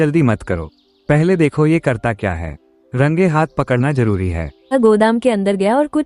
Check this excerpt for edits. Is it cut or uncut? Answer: cut